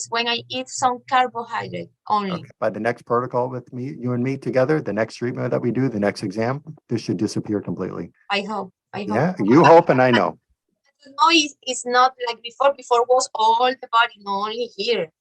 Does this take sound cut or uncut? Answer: cut